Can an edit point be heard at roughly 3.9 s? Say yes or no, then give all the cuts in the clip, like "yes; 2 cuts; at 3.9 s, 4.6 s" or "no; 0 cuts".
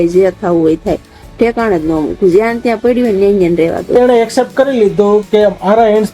yes; 1 cut; at 3.9 s